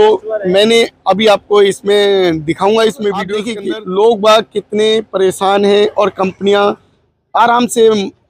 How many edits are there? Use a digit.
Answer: 1